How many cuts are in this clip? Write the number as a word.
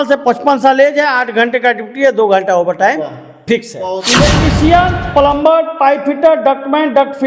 one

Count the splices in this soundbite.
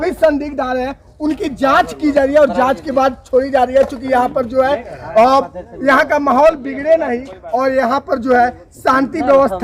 zero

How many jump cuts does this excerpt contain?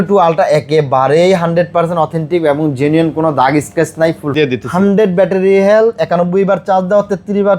one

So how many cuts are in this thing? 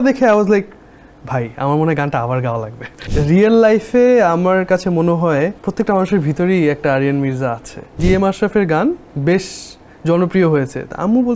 three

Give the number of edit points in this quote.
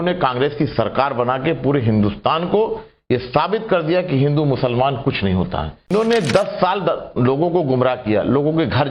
one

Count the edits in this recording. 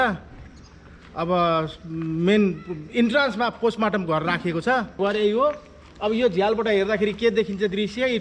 one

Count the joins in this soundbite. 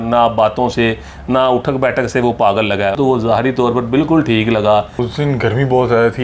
two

